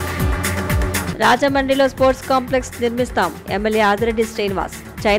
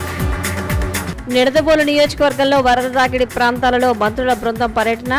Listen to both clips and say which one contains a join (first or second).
first